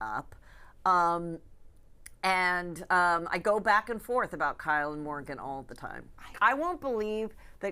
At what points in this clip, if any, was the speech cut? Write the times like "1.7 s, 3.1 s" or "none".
6.4 s

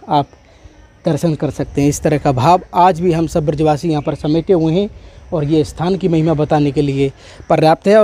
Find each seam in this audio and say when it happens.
none

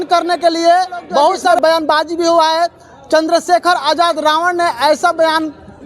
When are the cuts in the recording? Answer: 1.4 s

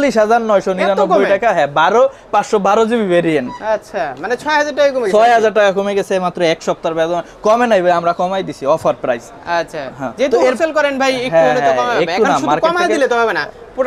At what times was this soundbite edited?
none

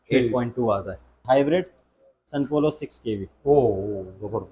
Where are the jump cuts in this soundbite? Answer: 1.2 s

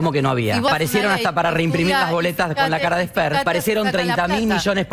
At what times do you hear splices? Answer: 0.7 s, 3.5 s

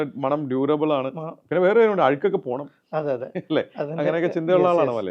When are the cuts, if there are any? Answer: none

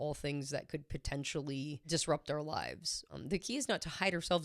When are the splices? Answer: 1.8 s, 3.0 s

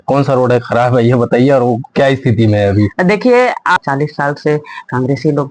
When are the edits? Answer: 3.8 s

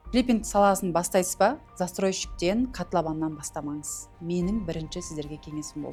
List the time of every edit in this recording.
none

